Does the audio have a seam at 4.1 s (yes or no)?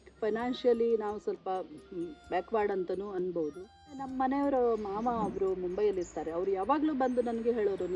yes